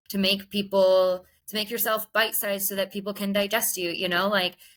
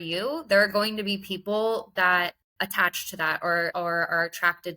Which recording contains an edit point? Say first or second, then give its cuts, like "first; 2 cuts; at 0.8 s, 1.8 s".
second; 2 cuts; at 2.4 s, 3.7 s